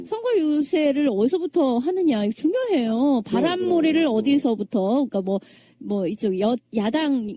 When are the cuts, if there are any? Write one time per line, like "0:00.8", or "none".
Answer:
0:06.2